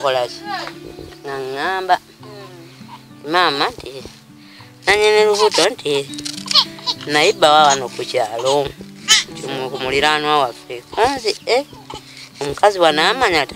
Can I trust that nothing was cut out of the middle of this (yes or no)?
yes